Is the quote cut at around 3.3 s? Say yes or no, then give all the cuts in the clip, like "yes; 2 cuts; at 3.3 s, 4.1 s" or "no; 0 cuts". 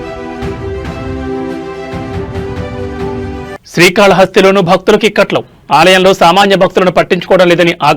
yes; 1 cut; at 3.3 s